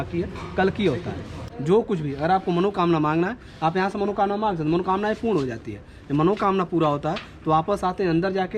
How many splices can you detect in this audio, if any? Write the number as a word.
one